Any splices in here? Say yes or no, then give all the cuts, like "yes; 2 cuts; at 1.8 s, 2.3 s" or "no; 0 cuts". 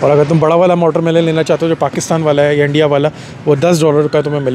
no; 0 cuts